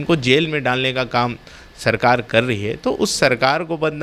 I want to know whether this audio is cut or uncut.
uncut